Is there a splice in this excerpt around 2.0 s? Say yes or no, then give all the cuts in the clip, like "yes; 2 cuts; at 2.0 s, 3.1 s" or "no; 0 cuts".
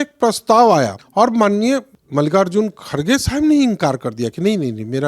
yes; 2 cuts; at 1.0 s, 2.0 s